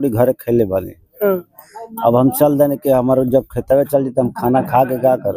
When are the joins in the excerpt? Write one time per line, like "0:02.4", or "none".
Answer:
none